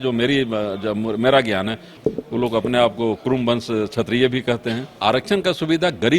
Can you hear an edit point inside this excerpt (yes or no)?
yes